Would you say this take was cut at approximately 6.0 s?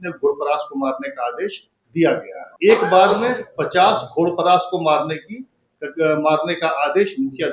no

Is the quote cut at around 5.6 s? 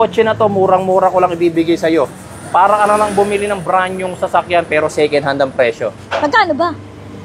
no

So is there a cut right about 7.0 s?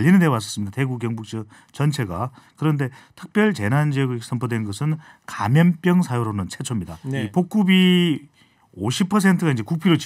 yes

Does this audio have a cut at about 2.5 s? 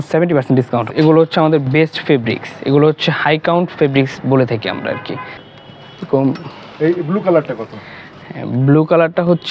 no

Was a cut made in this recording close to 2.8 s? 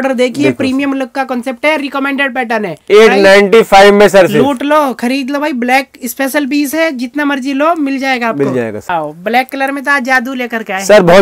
no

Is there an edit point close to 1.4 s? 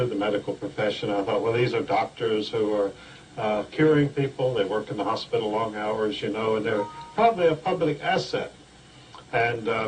yes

